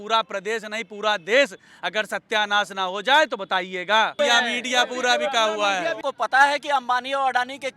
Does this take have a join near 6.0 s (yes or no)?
yes